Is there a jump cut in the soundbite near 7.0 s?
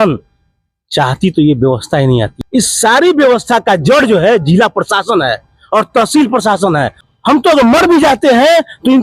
yes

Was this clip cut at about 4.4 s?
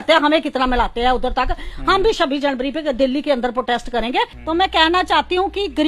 yes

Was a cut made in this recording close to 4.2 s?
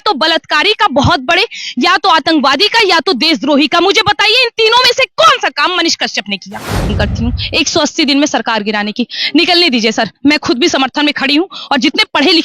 no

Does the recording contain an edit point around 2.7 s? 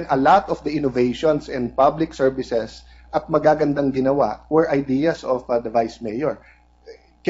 no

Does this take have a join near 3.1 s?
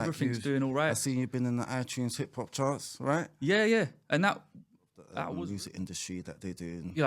no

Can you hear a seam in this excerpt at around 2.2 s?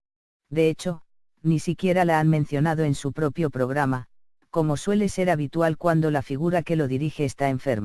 no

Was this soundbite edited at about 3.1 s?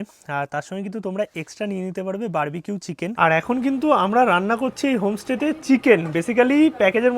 yes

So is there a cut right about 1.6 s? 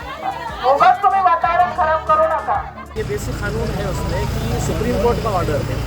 no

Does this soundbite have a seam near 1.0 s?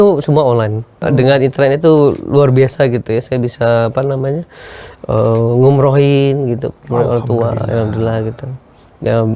yes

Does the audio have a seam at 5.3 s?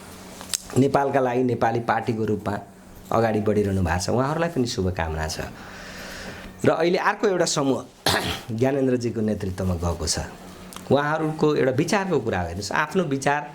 no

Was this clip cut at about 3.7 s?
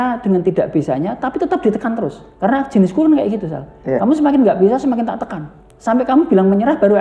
no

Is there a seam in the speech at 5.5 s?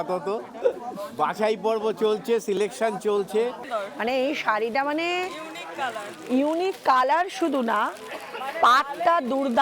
no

